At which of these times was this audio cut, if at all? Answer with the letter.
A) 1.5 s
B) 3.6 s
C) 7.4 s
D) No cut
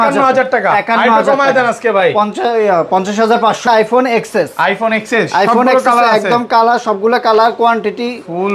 B